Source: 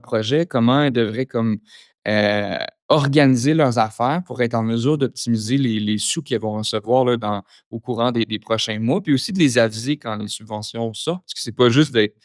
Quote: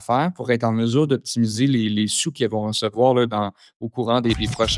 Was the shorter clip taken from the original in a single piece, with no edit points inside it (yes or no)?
yes